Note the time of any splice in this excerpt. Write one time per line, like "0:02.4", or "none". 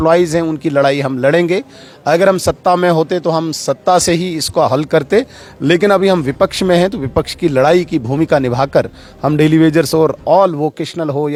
none